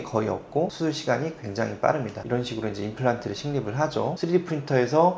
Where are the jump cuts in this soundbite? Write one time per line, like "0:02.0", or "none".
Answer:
0:02.2
0:04.1